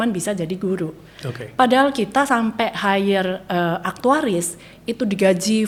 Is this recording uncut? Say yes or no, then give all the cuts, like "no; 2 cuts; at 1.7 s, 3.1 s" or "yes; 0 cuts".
yes; 0 cuts